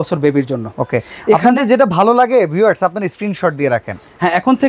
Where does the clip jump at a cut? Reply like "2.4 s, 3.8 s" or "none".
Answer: none